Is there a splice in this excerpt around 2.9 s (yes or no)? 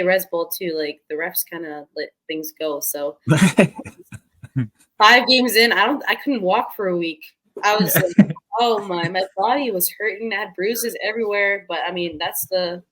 no